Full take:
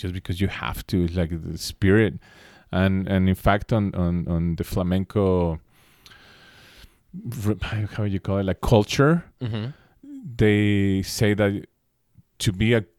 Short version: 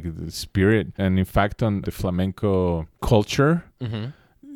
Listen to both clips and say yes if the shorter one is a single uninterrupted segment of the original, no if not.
no